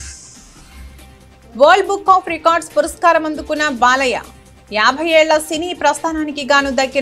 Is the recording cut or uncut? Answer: cut